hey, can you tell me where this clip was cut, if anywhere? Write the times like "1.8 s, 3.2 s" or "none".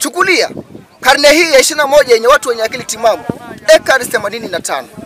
none